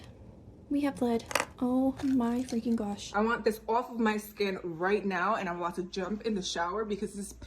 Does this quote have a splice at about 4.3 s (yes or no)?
no